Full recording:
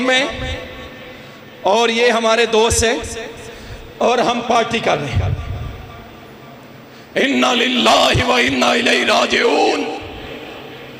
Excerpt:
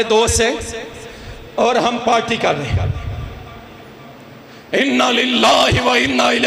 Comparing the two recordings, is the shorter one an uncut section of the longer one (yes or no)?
yes